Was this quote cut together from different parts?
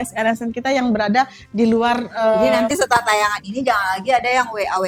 no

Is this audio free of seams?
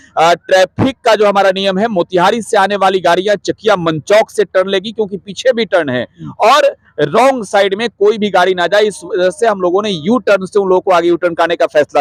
yes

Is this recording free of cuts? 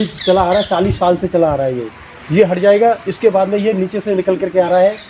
yes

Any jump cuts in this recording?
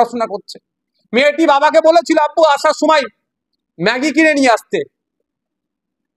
no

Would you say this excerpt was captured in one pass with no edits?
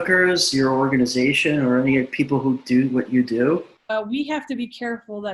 no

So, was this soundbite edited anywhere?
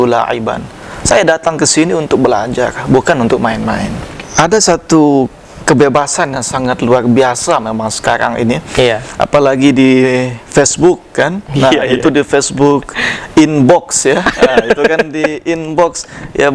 yes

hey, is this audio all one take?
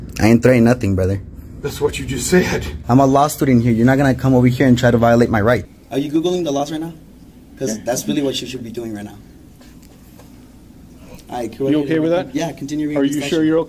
no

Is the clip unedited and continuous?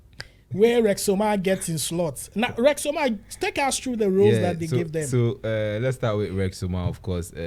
yes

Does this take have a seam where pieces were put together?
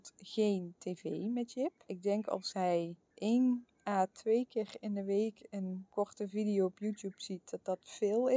yes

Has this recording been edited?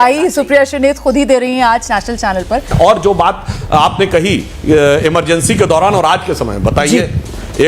yes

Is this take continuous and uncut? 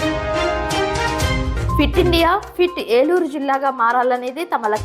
no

